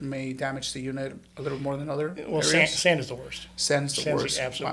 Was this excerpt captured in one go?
yes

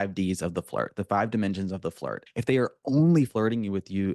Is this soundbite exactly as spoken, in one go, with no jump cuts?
no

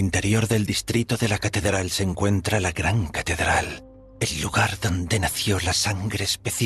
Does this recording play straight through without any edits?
yes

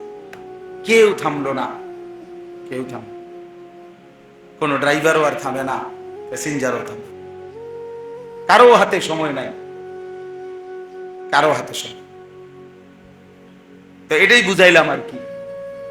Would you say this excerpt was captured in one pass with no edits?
no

